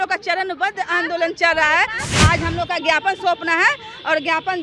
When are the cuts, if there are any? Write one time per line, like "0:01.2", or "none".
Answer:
0:02.2